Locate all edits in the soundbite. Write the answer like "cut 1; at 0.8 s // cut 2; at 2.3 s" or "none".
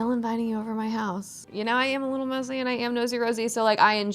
cut 1; at 1.4 s